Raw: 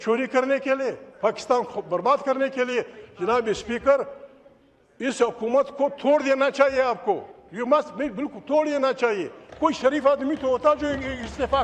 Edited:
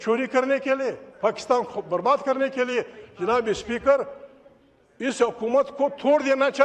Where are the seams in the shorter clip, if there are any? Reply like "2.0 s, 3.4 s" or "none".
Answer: none